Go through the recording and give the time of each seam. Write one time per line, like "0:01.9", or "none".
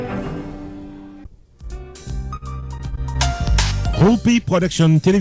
0:01.2